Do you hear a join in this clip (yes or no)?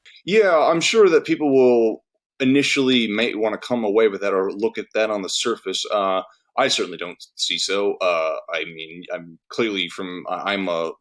no